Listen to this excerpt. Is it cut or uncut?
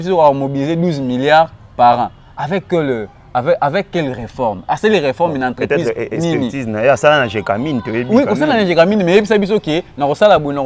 uncut